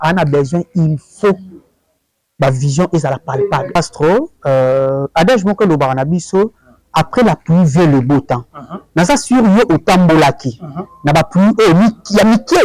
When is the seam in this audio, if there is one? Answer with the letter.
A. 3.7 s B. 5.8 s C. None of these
A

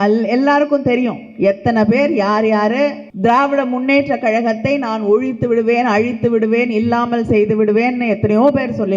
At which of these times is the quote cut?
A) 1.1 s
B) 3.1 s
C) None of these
B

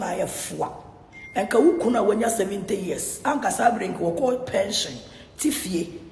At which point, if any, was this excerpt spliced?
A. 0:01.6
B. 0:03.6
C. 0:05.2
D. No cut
D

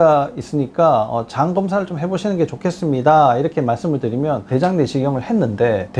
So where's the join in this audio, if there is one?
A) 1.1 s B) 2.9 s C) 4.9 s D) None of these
D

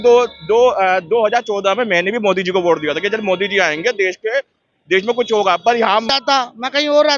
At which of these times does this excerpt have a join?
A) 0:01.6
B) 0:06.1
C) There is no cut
B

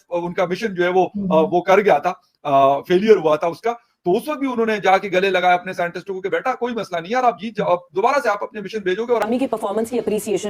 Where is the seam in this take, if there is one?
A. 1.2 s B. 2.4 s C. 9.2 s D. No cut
C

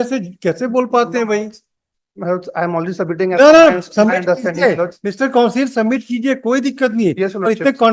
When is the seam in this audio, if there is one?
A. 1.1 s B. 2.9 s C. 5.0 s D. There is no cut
D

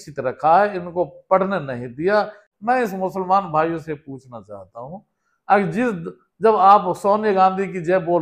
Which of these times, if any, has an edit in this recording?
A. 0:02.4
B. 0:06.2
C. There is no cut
A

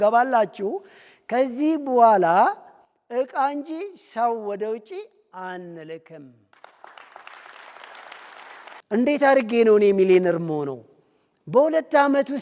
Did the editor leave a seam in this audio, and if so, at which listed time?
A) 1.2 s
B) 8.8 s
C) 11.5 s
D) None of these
B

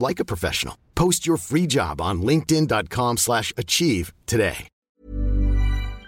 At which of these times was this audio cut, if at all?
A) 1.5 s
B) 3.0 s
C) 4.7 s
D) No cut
C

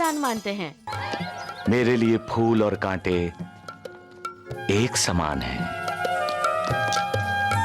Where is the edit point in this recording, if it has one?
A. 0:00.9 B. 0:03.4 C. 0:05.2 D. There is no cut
A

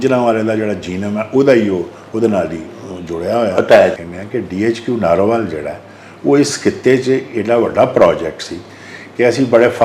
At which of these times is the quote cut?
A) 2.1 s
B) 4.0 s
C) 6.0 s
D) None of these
B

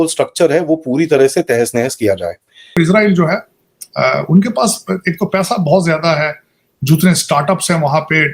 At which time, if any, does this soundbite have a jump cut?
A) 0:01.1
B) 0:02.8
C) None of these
B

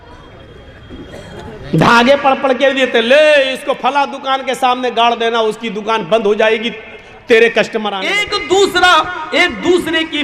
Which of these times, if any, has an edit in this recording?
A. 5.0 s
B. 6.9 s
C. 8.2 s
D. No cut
C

